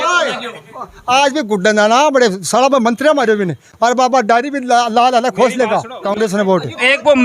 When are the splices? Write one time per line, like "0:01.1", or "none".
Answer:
0:06.0